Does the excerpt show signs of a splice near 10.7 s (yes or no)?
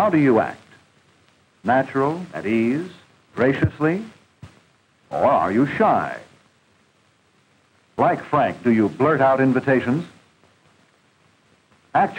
no